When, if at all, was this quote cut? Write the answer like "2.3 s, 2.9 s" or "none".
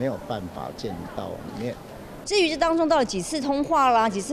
2.1 s